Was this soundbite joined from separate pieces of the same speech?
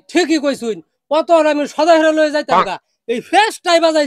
no; 0 cuts

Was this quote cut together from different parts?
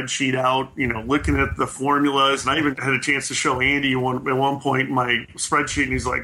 yes; 1 cut; at 2.8 s

